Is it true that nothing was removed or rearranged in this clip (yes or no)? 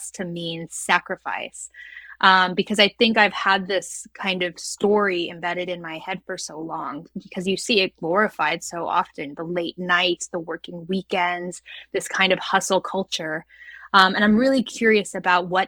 yes